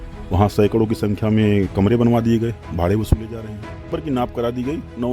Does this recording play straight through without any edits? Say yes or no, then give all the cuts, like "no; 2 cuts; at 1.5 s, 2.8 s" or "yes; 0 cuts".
no; 1 cut; at 3.9 s